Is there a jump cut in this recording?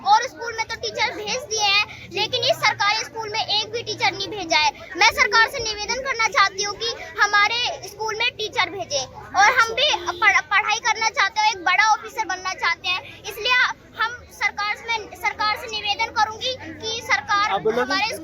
no; 0 cuts

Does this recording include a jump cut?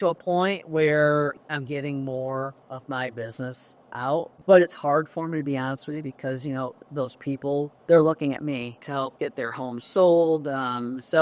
yes; 5 cuts; at 1.4 s, 2.7 s, 4.3 s, 7.8 s, 8.8 s

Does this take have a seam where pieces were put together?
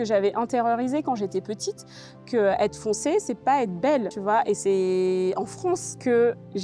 no; 0 cuts

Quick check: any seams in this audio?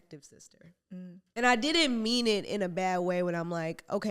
yes; 1 cut; at 1.2 s

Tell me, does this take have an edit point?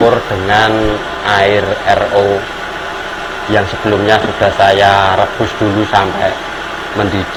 no; 0 cuts

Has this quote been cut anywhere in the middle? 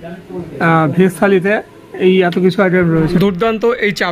yes; 1 cut; at 2.9 s

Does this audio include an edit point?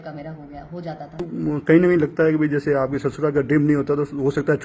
yes; 1 cut; at 1.1 s

